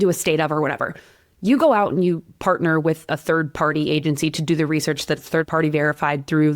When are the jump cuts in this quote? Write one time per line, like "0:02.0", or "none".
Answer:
0:05.5